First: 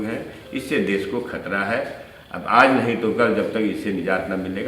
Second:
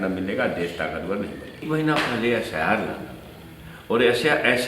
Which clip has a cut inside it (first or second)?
second